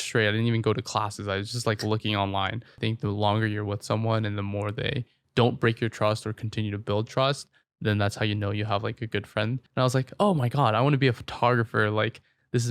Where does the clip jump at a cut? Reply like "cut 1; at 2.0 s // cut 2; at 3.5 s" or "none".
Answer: cut 1; at 2.7 s // cut 2; at 9.6 s